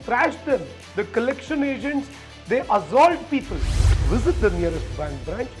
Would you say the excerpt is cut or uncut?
cut